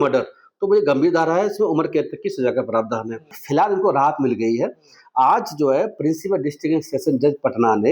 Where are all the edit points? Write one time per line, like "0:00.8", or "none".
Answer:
0:03.3